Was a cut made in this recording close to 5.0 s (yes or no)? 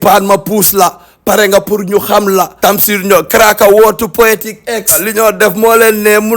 yes